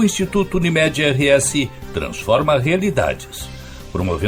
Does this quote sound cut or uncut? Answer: uncut